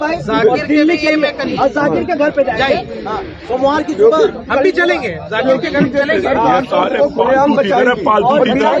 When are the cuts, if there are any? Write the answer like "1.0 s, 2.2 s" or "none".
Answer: none